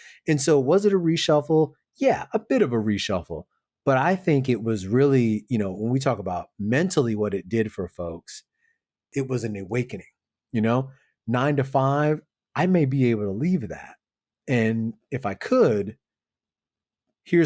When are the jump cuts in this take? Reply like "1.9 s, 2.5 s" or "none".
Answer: 9.1 s